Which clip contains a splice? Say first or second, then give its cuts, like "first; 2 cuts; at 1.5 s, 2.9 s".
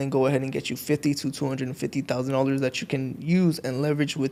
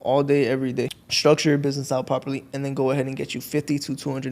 second; 1 cut; at 1.0 s